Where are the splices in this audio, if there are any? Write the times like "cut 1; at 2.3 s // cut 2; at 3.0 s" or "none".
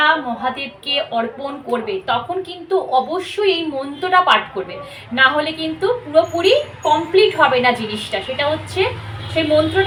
none